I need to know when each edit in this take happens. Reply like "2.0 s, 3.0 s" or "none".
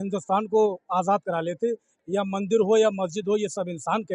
1.9 s